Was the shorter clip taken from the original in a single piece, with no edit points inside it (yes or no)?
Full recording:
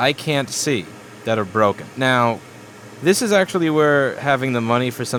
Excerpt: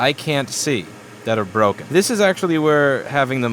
no